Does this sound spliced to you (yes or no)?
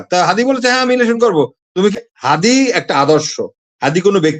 yes